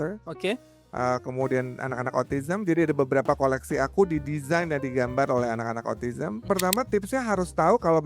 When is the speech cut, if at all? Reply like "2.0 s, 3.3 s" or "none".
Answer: 6.5 s